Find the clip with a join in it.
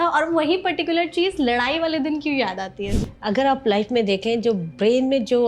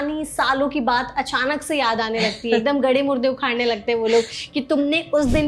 first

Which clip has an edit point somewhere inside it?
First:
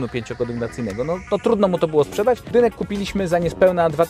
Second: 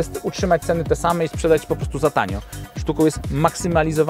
first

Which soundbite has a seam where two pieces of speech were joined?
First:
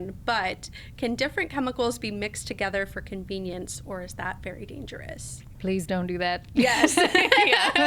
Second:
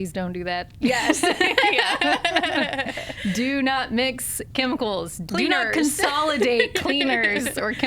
second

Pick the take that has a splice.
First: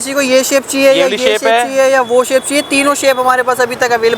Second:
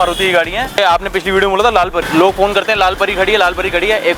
second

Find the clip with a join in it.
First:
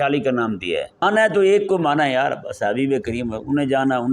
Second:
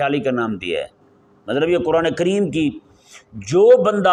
first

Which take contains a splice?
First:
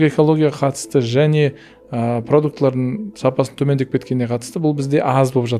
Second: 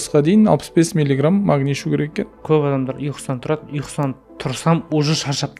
second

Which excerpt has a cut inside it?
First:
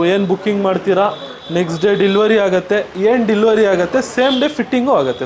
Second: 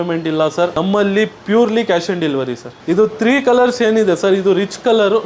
second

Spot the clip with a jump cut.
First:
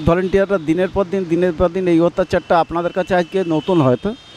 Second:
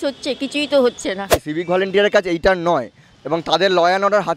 second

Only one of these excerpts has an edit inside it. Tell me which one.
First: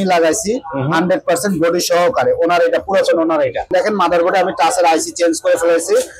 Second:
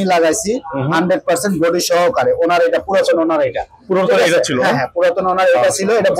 first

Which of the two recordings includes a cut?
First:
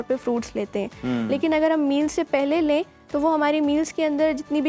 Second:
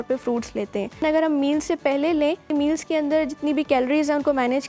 second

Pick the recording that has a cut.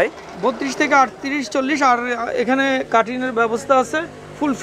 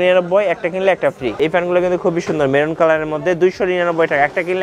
second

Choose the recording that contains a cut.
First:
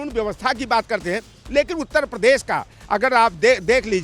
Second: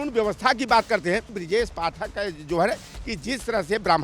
second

